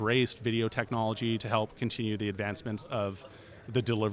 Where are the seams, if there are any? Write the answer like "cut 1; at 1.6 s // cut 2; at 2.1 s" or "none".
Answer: cut 1; at 1.4 s